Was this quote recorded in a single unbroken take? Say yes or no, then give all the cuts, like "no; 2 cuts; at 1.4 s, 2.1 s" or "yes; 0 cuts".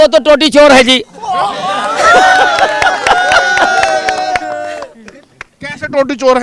yes; 0 cuts